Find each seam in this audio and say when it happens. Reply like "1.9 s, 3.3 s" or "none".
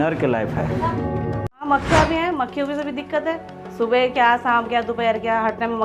1.7 s